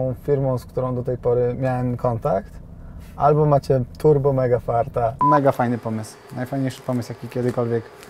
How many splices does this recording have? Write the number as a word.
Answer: one